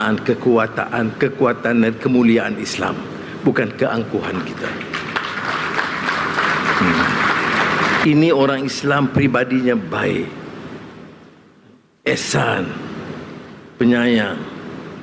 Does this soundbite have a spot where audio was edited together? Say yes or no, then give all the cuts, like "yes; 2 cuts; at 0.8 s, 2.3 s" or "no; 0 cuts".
yes; 1 cut; at 7.9 s